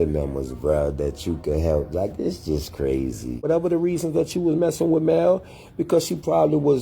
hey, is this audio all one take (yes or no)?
no